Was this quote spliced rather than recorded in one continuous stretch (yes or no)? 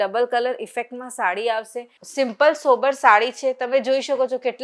yes